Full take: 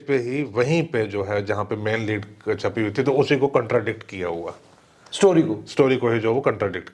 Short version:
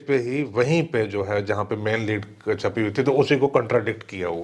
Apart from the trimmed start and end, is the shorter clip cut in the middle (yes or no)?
no